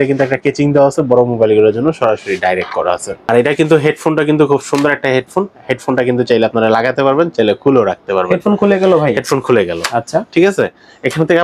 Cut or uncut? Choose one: cut